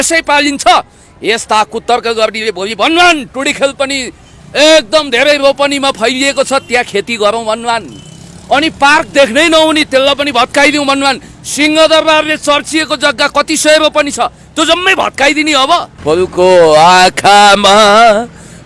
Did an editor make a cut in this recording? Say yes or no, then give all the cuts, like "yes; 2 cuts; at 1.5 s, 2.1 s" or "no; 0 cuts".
yes; 1 cut; at 15.9 s